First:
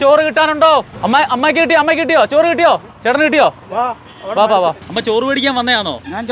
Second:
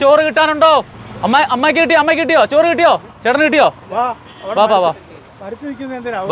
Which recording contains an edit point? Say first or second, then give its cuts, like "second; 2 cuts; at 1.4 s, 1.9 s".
first; 2 cuts; at 0.9 s, 4.8 s